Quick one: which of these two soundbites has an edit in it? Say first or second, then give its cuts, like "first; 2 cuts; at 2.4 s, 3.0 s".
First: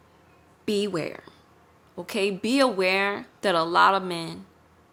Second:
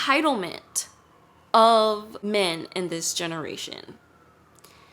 second; 1 cut; at 2.1 s